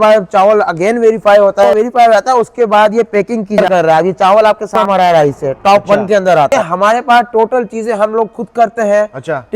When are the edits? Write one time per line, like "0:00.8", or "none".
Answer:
0:01.7
0:03.6
0:04.8
0:06.5